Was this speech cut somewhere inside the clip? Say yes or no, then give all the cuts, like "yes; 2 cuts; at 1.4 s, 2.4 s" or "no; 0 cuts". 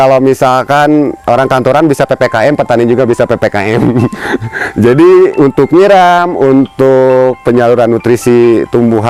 no; 0 cuts